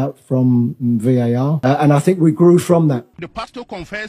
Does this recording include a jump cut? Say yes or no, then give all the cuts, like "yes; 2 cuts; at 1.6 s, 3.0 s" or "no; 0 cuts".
yes; 2 cuts; at 1.6 s, 3.2 s